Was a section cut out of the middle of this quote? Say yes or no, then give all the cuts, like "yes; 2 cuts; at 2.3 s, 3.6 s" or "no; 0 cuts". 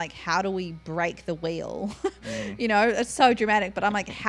no; 0 cuts